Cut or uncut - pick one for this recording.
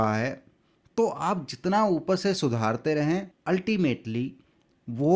cut